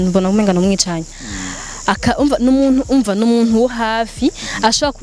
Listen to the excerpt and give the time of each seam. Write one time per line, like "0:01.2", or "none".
0:01.2